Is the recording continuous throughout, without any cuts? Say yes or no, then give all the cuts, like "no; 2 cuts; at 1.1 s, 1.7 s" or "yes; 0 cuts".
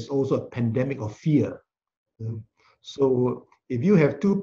yes; 0 cuts